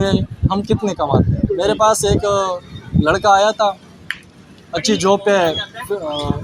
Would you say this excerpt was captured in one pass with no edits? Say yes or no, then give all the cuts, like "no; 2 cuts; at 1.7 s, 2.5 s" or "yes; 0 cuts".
no; 1 cut; at 1.5 s